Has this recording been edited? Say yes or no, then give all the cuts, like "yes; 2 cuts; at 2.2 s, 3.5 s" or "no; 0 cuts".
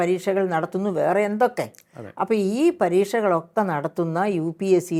no; 0 cuts